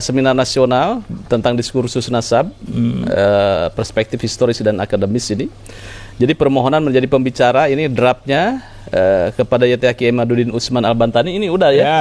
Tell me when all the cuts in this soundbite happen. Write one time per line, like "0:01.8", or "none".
none